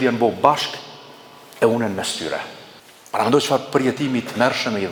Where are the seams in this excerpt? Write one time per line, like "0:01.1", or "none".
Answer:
none